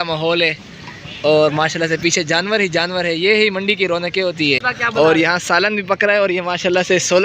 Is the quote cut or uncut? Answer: cut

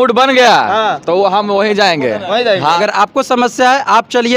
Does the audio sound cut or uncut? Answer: cut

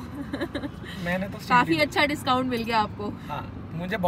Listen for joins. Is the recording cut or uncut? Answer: uncut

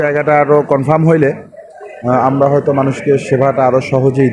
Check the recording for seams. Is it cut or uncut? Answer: uncut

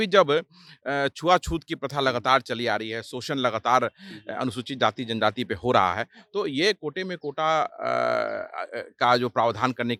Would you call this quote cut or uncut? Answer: uncut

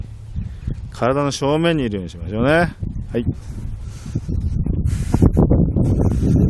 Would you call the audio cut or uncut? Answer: cut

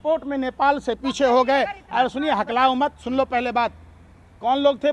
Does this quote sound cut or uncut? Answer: uncut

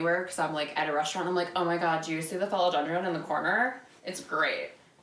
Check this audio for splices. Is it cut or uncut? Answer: uncut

